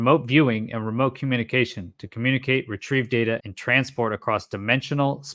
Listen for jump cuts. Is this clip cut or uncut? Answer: cut